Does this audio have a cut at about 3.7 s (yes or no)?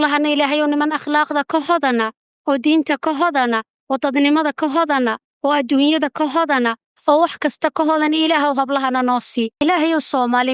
no